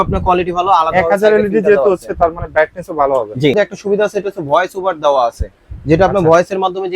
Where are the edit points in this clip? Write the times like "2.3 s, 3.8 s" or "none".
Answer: 3.5 s